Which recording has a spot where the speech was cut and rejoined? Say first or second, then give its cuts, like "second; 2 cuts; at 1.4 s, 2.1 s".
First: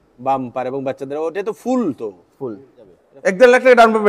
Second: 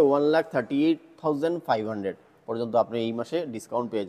first; 1 cut; at 3.0 s